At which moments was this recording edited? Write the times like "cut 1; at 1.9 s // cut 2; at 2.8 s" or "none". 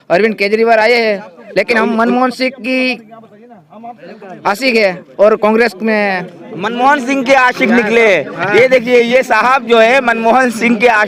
none